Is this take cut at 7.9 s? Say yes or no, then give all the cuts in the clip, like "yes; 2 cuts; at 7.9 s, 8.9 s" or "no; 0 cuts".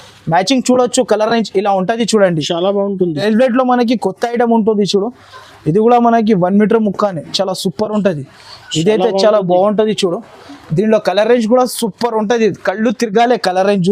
no; 1 cut; at 3.2 s